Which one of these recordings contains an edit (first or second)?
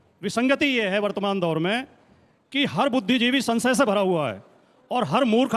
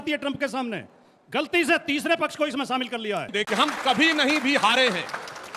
second